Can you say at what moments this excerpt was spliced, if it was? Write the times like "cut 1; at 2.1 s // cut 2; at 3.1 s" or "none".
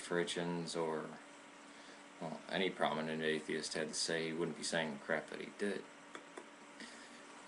cut 1; at 6.3 s